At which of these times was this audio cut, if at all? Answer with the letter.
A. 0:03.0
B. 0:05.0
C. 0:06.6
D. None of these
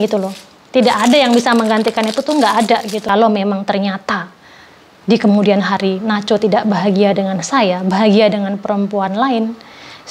A